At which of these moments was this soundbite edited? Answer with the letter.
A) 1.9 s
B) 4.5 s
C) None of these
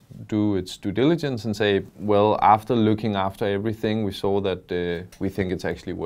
C